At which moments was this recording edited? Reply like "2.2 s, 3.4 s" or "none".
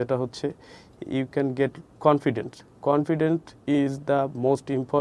1.9 s